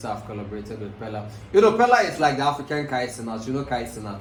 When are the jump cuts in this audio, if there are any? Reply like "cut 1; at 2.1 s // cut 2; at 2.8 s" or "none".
none